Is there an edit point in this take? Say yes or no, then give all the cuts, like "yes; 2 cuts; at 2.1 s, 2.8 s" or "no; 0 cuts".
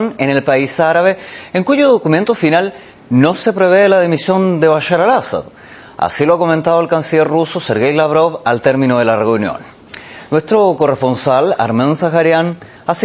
yes; 1 cut; at 1.3 s